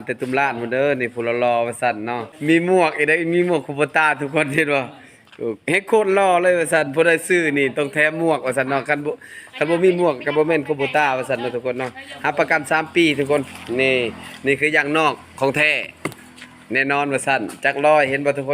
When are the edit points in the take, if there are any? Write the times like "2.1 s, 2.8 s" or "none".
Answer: 2.3 s

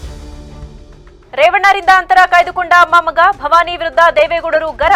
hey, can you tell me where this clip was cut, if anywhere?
none

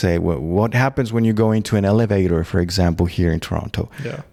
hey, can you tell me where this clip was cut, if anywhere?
none

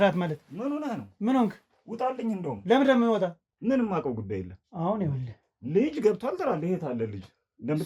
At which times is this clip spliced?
3.5 s

